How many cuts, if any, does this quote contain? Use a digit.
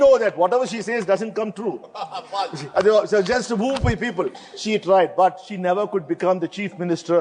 0